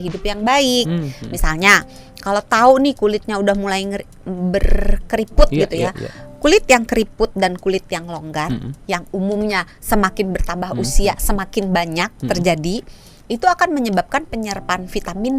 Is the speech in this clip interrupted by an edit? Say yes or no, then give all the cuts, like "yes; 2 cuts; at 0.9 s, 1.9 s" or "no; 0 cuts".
no; 0 cuts